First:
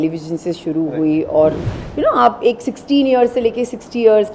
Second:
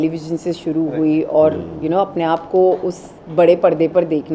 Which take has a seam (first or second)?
first